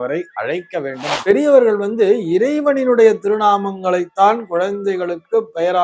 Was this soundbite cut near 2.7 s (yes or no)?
no